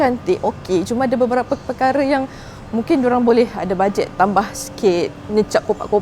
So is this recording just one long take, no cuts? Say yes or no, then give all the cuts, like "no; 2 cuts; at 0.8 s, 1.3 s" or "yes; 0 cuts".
yes; 0 cuts